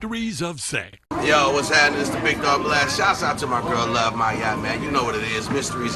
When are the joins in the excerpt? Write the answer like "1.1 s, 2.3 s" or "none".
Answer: 1.0 s

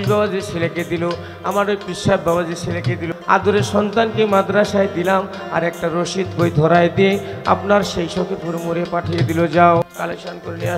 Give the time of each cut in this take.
3.1 s, 9.8 s

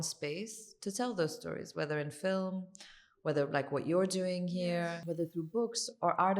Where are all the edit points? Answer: 5.0 s

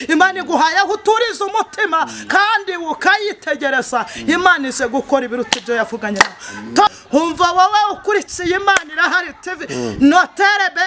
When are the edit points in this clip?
7.0 s

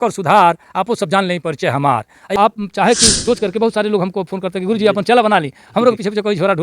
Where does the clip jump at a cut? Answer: 2.2 s

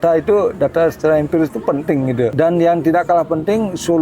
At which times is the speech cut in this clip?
2.3 s

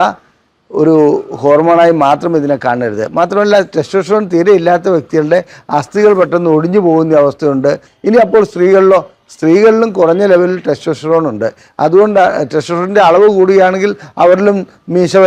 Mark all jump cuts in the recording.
7.9 s

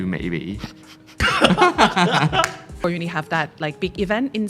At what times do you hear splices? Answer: 1.2 s, 2.8 s

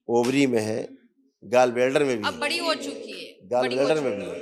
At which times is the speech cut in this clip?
none

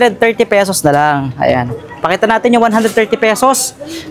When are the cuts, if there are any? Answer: none

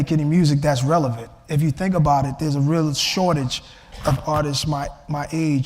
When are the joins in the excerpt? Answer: none

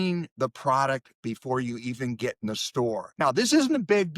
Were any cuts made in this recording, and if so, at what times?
3.1 s

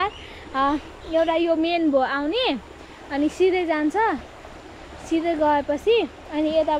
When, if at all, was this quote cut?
none

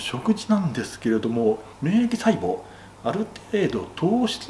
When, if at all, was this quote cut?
1.7 s

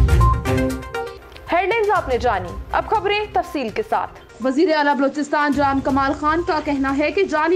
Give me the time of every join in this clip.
none

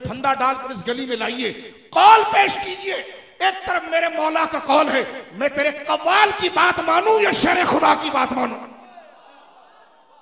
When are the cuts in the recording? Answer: none

